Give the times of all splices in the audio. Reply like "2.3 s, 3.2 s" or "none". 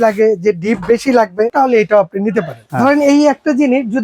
1.5 s, 2.6 s